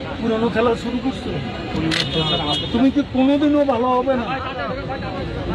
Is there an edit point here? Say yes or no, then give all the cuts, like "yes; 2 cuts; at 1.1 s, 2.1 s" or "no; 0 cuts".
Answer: no; 0 cuts